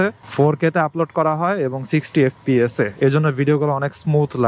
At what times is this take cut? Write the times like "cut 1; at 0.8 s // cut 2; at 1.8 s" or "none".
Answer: none